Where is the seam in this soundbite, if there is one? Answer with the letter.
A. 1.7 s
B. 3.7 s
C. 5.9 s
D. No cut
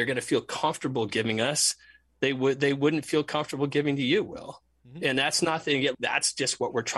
C